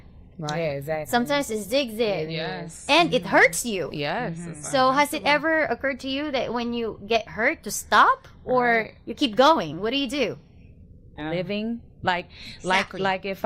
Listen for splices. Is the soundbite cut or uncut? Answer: cut